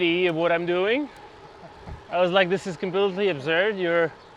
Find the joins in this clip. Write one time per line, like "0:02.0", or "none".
none